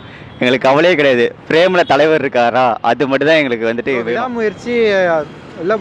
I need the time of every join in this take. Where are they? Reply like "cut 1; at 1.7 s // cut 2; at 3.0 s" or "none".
cut 1; at 4.3 s